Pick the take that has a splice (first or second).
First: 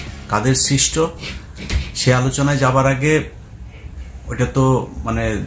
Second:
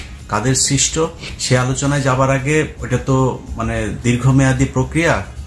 second